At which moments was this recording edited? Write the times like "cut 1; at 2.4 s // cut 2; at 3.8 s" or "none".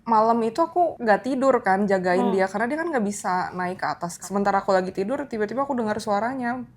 cut 1; at 1.0 s // cut 2; at 4.2 s